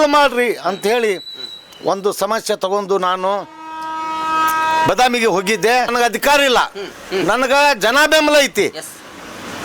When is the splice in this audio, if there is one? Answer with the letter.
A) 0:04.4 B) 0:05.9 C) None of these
B